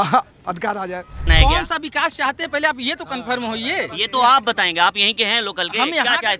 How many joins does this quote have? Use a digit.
1